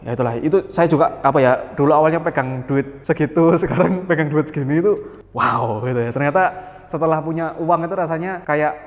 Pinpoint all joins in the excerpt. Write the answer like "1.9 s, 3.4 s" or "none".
none